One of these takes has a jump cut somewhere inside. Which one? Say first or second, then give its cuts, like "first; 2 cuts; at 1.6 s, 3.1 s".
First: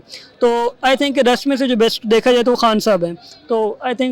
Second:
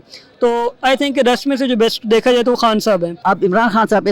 second; 1 cut; at 3.1 s